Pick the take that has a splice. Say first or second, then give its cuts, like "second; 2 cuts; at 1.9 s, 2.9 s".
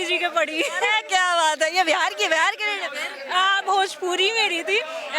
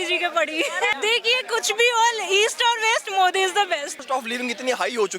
second; 2 cuts; at 0.9 s, 4.0 s